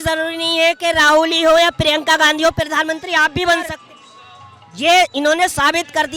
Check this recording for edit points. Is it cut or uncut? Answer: cut